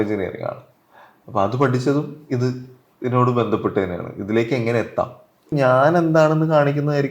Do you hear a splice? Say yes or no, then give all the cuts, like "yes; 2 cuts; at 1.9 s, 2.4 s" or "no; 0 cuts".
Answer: yes; 1 cut; at 5.5 s